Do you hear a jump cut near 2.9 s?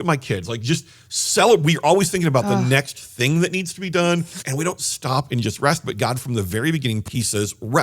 no; 2 cuts; at 4.4 s, 7.1 s

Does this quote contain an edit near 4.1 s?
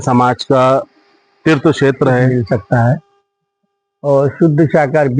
no; 1 cut; at 2.3 s

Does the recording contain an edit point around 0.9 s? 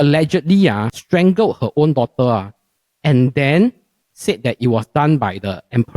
yes; 1 cut; at 0.9 s

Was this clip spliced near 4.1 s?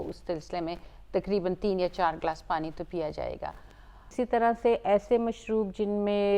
yes; 1 cut; at 4.1 s

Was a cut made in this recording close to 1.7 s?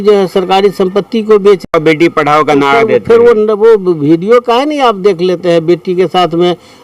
yes; 1 cut; at 1.7 s

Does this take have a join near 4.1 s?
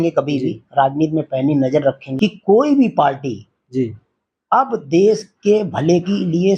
no; 1 cut; at 2.1 s

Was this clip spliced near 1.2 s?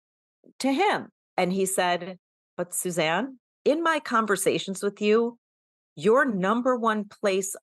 yes; 2 cuts; at 1.2 s, 3.4 s

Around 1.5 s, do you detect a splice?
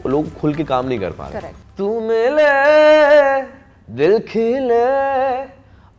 yes; 1 cut; at 1.5 s

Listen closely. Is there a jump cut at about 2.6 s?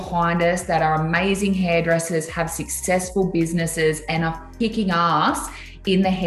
no; 1 cut; at 4.5 s

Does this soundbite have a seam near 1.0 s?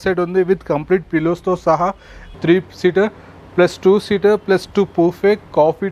no; 1 cut; at 2.3 s

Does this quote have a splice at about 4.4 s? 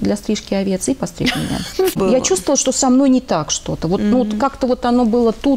no; 1 cut; at 2.0 s

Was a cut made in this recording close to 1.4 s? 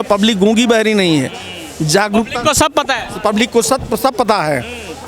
no; 0 cuts

